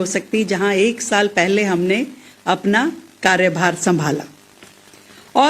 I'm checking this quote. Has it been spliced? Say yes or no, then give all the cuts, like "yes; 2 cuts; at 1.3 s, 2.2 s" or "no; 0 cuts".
yes; 1 cut; at 2.6 s